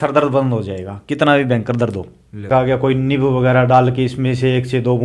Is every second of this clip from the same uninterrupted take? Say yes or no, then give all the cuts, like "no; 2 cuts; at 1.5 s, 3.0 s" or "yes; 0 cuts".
no; 1 cut; at 2.5 s